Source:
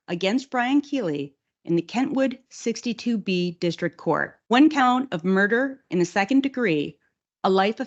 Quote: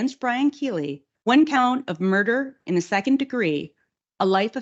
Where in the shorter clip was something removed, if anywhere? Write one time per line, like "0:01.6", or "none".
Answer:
0:01.1